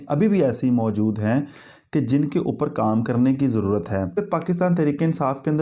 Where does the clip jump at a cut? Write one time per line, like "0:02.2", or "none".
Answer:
0:04.1

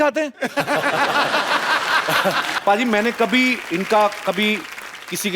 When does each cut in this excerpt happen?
0:02.5

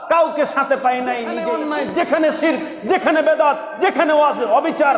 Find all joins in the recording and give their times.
0:01.4

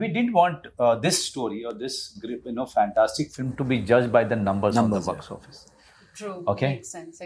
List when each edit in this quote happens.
none

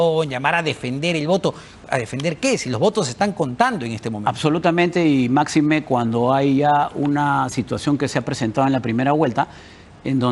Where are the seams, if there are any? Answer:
none

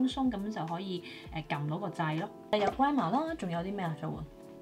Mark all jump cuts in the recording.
0:02.5

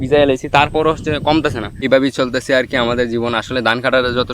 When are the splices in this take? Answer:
0:01.8

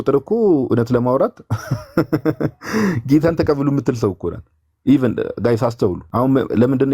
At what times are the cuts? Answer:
0:06.0

